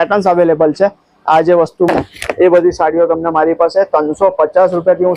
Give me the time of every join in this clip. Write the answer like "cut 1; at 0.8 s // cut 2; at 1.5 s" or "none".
cut 1; at 1.9 s